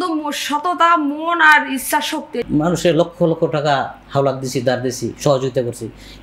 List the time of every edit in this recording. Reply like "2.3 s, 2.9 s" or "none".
2.4 s